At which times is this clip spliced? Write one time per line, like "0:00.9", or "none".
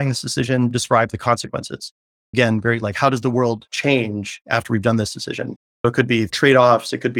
none